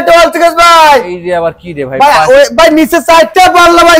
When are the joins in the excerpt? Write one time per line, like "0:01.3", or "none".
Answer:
none